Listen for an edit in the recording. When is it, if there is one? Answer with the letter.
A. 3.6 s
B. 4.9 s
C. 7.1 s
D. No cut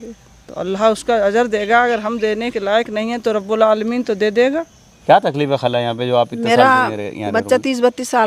B